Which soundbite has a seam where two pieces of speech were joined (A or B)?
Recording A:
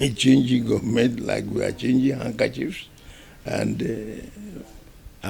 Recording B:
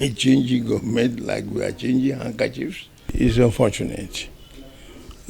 B